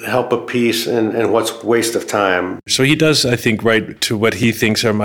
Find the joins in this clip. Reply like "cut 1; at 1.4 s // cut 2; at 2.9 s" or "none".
cut 1; at 2.7 s // cut 2; at 4.0 s